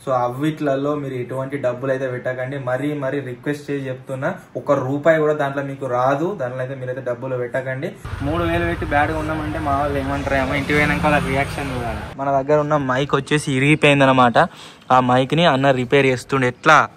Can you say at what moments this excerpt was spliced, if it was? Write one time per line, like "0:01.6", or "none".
0:08.1
0:12.1